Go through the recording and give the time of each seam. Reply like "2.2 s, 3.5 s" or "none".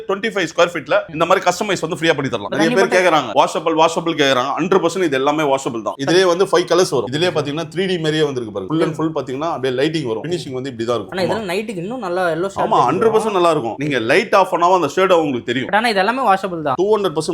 2.4 s, 7.1 s, 11.1 s